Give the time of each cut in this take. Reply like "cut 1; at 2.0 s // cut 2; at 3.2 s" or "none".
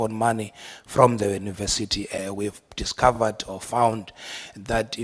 cut 1; at 2.1 s